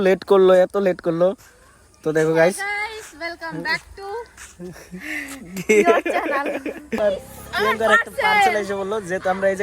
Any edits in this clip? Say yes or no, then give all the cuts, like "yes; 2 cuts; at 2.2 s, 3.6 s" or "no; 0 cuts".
yes; 1 cut; at 7.0 s